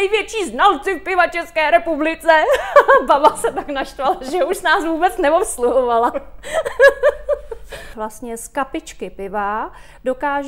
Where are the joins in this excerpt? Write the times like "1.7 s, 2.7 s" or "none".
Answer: 7.8 s